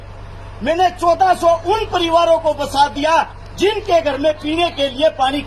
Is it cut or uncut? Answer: uncut